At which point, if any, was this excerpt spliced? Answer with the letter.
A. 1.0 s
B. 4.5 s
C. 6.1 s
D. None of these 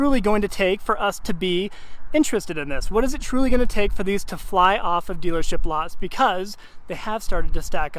D